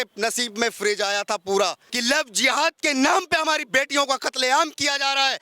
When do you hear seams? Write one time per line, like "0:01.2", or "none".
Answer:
0:01.9